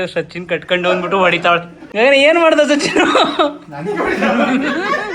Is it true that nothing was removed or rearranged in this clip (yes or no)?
no